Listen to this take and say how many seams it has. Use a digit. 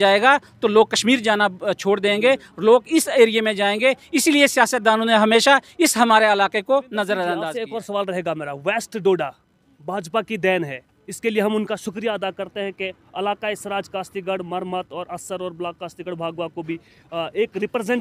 1